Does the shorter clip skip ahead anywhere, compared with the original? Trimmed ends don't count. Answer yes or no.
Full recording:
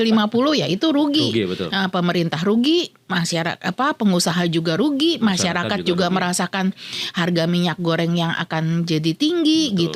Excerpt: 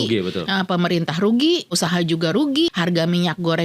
yes